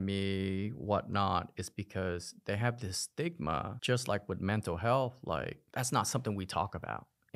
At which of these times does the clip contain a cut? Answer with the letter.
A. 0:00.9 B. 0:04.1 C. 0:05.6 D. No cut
C